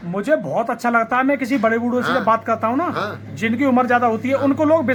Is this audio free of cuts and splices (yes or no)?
yes